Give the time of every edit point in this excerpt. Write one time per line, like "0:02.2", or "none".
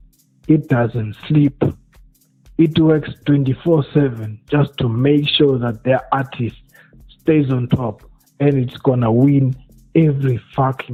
none